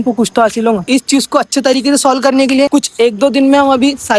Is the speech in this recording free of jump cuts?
no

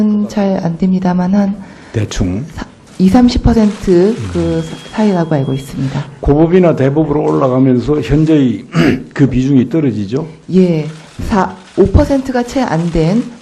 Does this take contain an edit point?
yes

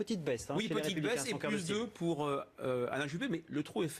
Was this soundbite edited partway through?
yes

